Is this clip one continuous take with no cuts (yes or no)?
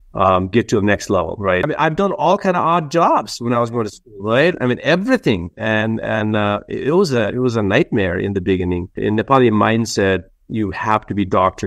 no